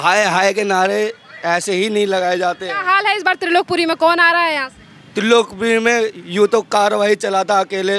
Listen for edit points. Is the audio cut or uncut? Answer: uncut